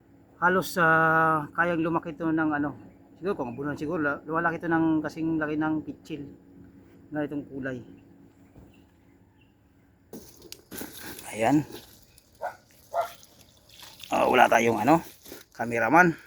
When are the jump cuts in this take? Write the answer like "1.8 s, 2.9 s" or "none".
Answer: 10.1 s